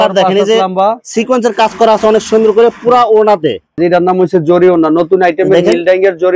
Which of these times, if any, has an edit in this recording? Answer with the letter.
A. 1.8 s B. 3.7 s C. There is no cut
B